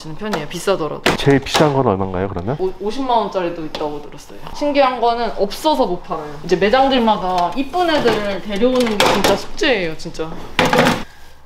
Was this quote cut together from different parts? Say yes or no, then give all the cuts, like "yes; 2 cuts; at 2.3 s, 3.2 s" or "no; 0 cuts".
yes; 3 cuts; at 2.6 s, 4.4 s, 6.3 s